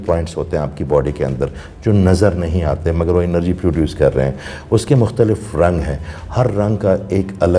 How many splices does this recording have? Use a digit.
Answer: 0